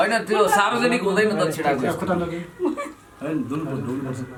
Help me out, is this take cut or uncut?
uncut